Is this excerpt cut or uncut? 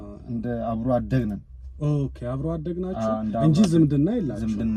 uncut